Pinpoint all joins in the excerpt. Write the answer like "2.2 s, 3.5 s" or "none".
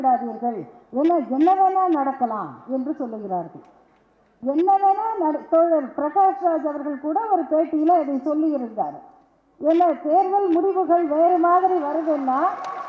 none